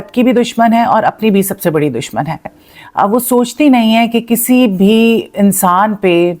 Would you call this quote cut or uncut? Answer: cut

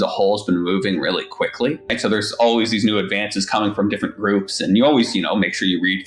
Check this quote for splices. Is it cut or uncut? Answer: cut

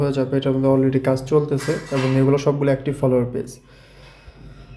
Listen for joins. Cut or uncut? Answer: uncut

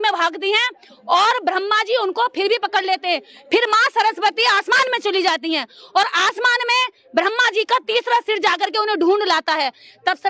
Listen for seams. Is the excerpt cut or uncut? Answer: uncut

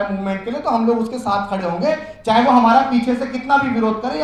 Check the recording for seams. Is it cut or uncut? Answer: uncut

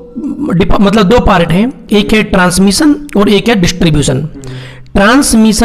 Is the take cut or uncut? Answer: uncut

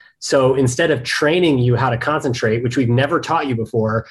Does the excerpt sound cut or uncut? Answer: uncut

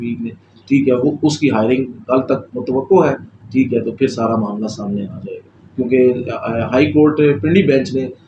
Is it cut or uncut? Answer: uncut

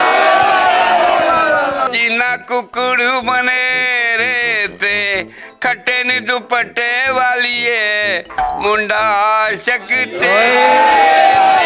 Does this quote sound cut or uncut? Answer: uncut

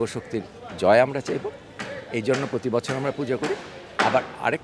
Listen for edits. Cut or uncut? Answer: uncut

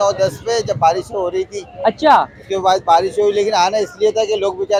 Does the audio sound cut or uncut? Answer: uncut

